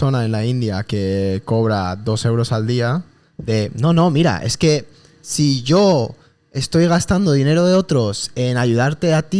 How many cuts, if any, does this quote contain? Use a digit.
0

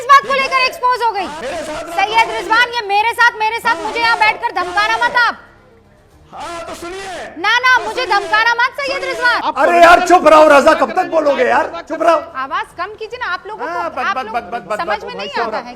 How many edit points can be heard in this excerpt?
2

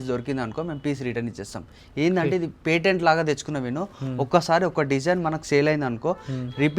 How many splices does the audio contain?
0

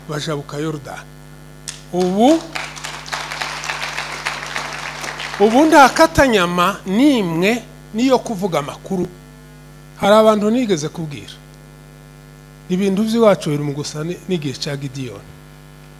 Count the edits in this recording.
1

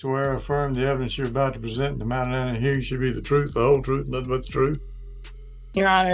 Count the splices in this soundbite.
0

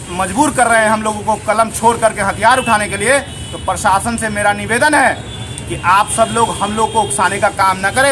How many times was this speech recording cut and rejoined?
0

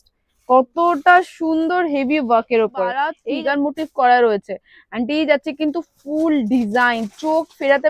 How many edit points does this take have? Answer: 1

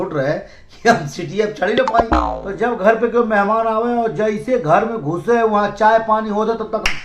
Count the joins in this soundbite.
1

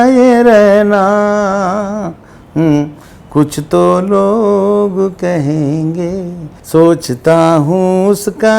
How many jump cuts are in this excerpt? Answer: 1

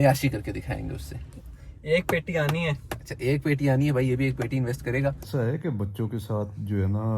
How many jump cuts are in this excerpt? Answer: 2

